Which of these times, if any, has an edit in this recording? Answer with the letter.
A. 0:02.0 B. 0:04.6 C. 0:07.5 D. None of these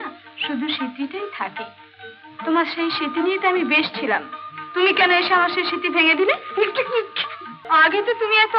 C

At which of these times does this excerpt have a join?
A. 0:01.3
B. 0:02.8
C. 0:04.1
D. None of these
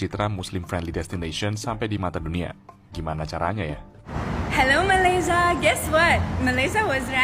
C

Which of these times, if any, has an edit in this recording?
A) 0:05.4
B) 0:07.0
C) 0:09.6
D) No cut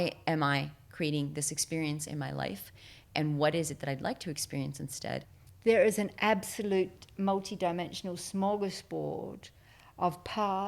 A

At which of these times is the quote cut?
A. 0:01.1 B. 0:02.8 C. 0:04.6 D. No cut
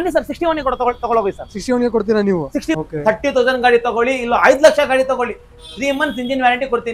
B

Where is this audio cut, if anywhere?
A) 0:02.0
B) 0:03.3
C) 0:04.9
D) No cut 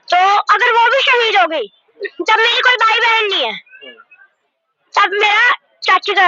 A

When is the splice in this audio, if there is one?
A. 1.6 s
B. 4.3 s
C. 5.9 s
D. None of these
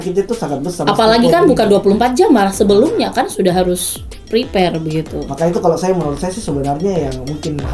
D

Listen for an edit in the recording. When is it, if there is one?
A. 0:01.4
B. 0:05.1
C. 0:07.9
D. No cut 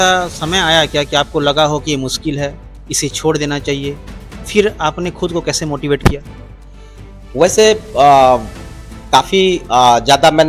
D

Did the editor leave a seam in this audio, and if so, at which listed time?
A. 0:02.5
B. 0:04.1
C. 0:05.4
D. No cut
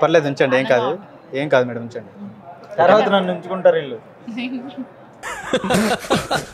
D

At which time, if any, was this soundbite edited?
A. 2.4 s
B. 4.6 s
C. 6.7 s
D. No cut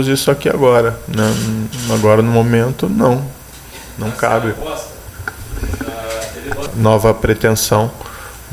C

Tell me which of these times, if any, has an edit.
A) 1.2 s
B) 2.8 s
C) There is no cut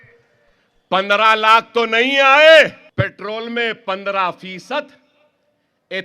B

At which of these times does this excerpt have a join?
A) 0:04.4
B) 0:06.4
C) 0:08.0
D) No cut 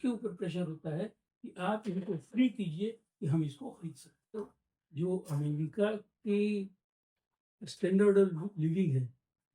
A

